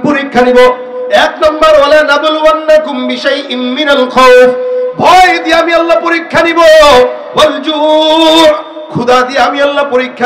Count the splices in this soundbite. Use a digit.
0